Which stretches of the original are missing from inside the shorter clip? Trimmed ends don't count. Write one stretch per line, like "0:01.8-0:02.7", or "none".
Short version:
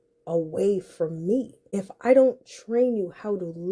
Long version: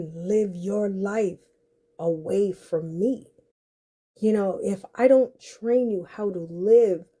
0:03.5-0:04.7